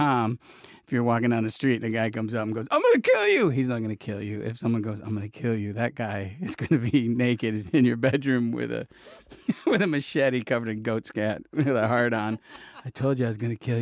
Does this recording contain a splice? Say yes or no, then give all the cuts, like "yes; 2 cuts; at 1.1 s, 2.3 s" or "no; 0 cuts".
no; 0 cuts